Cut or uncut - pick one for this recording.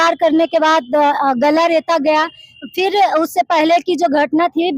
uncut